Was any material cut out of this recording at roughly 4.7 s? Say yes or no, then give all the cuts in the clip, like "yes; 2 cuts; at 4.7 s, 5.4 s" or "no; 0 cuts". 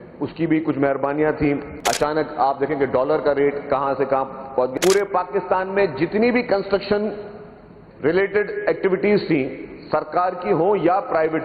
yes; 2 cuts; at 1.7 s, 4.7 s